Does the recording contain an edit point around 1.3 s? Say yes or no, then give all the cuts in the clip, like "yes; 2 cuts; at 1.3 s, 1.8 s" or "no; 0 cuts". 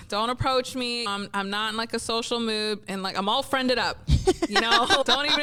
no; 0 cuts